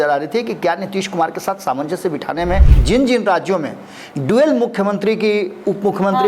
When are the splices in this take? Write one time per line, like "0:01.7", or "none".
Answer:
0:02.7

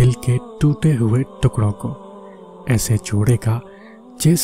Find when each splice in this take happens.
none

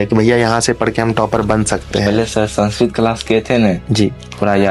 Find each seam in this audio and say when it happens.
none

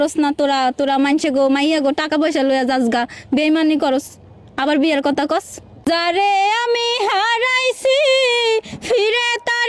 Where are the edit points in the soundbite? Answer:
0:05.9

